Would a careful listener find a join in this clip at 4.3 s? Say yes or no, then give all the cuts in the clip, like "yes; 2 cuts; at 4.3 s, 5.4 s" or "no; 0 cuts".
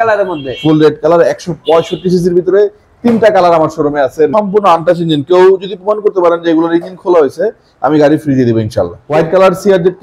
yes; 2 cuts; at 4.3 s, 9.1 s